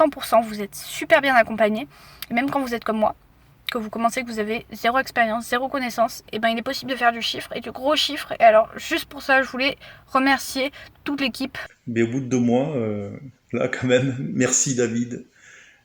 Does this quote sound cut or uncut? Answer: cut